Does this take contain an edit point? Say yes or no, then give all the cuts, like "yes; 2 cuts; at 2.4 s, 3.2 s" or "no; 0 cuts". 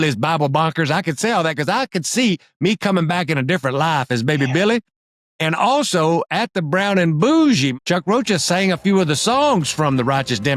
yes; 1 cut; at 7.7 s